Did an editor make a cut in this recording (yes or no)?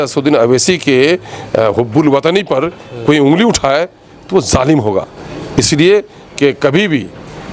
no